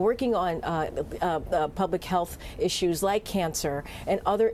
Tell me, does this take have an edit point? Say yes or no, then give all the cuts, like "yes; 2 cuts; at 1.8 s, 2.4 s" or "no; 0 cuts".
yes; 1 cut; at 2.8 s